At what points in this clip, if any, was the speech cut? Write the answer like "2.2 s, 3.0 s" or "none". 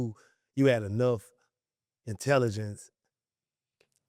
none